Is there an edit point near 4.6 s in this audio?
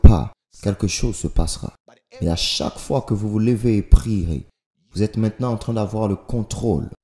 no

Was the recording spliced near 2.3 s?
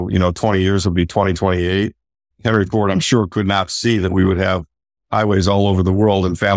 yes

